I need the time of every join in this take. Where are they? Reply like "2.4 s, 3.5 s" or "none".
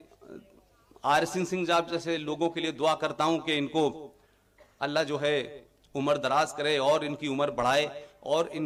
none